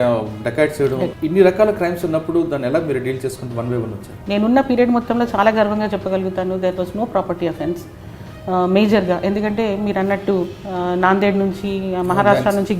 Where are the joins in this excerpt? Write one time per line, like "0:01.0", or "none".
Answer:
0:01.1
0:04.1